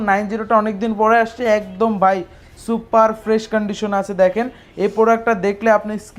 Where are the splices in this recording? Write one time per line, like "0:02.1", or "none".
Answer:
none